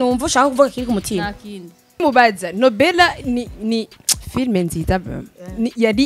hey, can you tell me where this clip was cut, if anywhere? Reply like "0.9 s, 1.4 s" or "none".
2.0 s